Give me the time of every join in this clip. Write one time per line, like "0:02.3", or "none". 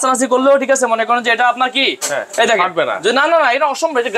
none

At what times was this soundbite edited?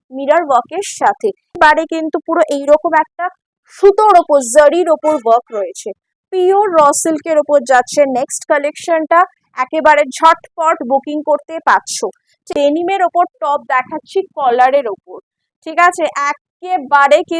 0:01.5
0:12.5

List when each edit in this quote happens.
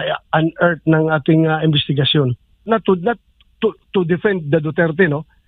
0:02.6

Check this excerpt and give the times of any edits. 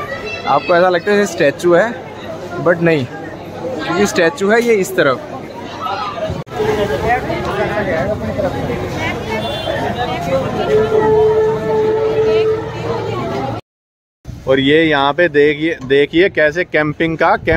none

